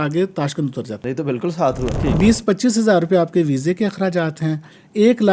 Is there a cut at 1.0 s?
yes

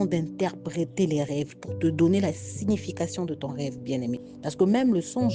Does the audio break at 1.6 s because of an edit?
yes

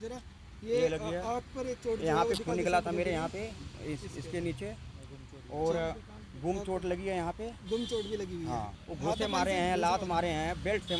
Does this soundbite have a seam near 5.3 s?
no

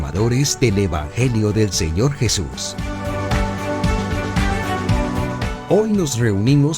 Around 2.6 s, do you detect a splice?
yes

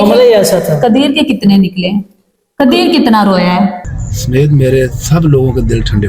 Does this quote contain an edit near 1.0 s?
no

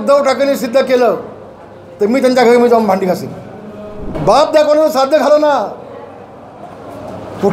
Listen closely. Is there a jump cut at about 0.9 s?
no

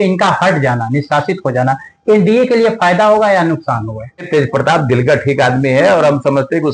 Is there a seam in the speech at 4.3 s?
yes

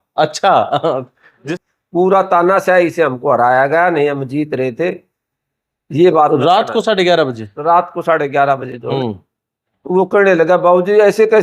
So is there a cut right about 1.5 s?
yes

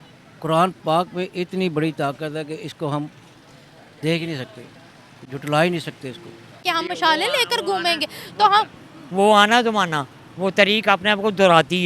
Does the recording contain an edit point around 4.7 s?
no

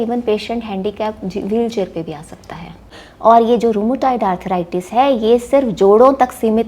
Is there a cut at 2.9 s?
yes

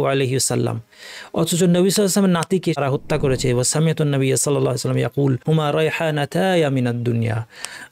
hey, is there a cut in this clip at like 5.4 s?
yes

